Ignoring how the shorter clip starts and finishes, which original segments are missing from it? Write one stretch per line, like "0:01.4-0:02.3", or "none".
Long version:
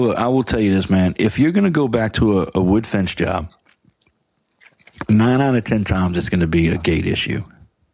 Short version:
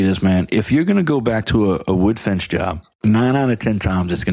0:03.5-0:04.9